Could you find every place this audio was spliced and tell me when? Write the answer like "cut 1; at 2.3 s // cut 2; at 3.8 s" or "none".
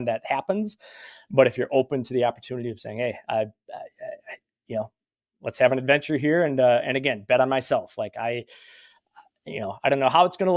none